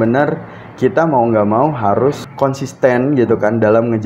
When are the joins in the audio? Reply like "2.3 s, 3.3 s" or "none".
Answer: 2.3 s